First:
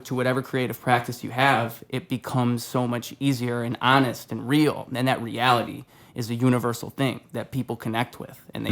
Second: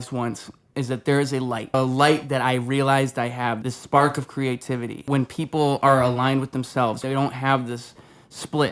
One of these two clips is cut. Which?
second; 4 cuts; at 1.7 s, 3.7 s, 5.0 s, 7.0 s

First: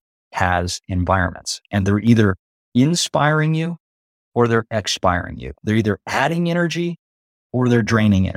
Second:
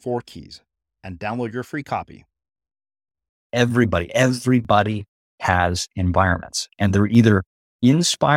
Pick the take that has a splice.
second; 1 cut; at 3.4 s

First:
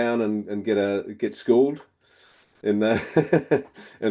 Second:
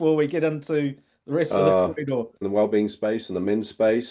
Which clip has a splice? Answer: second; 1 cut; at 2.4 s

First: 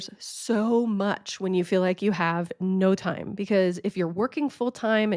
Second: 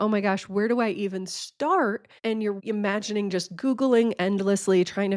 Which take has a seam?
second; 1 cut; at 2.5 s

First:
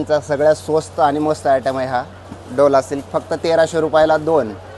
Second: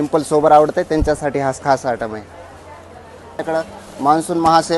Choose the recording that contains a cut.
second; 1 cut; at 3.4 s

